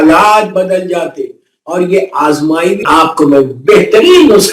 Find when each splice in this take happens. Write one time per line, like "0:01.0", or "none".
0:02.9